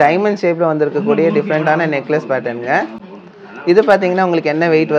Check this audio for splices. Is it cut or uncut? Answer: uncut